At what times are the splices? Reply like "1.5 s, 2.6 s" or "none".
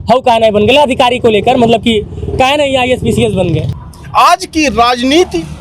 3.7 s